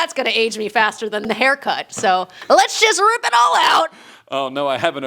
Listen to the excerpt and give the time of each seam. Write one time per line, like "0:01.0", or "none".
0:01.3
0:02.3